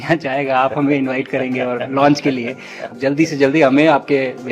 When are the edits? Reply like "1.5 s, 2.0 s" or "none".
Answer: 2.9 s